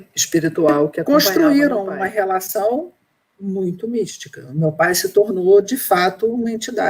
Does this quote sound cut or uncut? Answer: cut